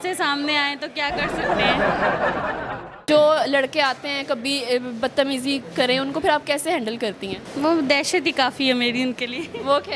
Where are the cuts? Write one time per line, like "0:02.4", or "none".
0:03.0
0:07.4